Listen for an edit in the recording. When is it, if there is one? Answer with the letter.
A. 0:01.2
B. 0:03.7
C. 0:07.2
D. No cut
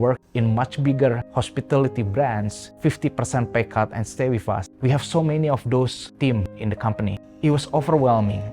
A